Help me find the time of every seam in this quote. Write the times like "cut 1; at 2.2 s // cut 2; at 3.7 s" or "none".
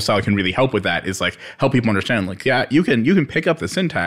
none

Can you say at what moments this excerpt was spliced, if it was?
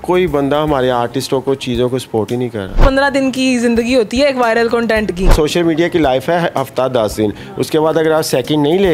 cut 1; at 2.8 s // cut 2; at 5.3 s

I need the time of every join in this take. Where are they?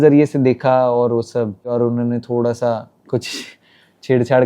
cut 1; at 1.7 s

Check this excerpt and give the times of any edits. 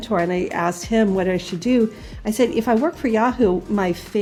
none

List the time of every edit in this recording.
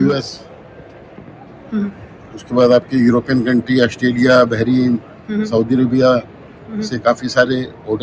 none

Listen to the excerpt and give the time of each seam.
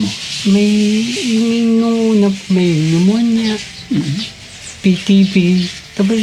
none

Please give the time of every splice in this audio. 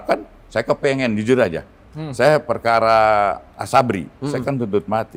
none

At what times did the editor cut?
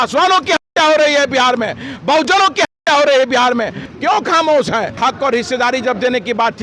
cut 1; at 3.8 s // cut 2; at 5.0 s

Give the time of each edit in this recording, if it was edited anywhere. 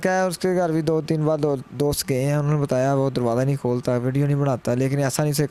none

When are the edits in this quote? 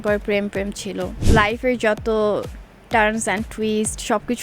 cut 1; at 1.2 s

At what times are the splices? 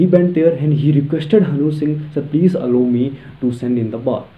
none

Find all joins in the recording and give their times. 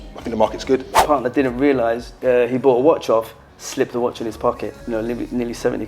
cut 1; at 1.0 s // cut 2; at 2.2 s // cut 3; at 4.8 s

